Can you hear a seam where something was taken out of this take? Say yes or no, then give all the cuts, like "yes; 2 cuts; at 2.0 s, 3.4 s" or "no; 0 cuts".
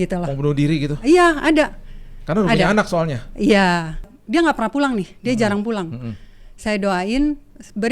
yes; 1 cut; at 4.2 s